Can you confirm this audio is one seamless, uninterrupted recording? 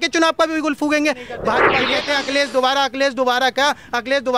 no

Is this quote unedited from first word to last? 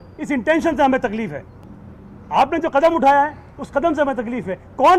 yes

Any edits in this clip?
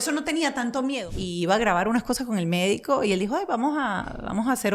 yes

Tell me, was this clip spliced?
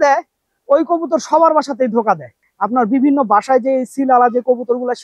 yes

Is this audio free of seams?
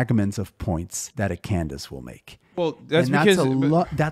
no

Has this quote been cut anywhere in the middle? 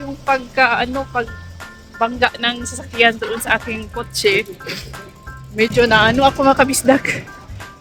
no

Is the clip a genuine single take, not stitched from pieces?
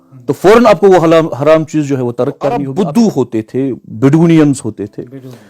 no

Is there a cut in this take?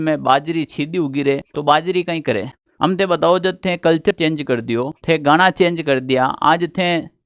yes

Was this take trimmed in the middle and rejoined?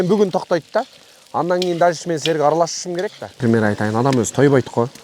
yes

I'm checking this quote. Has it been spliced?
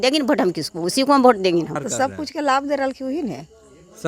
yes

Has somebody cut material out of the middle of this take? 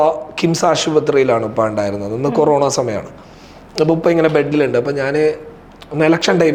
no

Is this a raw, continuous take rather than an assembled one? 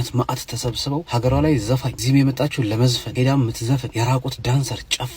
no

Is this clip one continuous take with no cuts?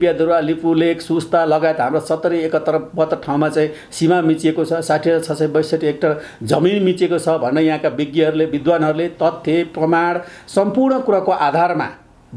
yes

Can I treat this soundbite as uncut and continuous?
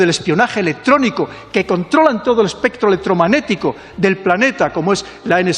yes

